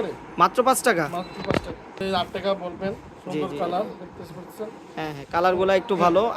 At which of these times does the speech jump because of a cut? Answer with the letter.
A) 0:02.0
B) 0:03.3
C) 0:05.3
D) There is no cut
A